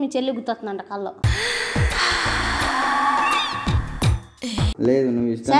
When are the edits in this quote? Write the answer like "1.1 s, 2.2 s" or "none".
4.7 s